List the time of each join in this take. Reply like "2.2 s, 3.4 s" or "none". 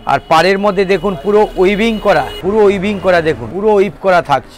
2.3 s, 3.5 s